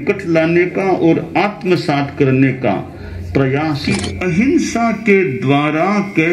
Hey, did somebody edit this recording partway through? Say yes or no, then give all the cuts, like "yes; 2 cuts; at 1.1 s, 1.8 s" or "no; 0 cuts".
yes; 1 cut; at 4.1 s